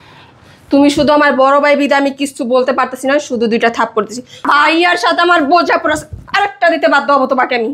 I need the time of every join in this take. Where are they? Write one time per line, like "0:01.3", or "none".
0:04.4